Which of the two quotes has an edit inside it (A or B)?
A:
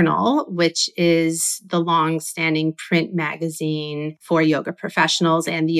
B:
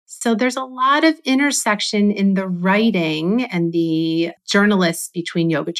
A